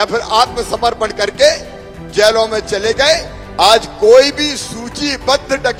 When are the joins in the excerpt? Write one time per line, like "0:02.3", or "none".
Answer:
none